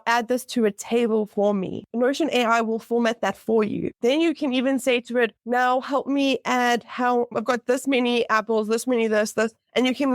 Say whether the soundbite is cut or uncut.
cut